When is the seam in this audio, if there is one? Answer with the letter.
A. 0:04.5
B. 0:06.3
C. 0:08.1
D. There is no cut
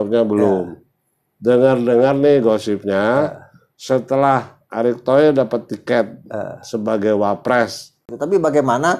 C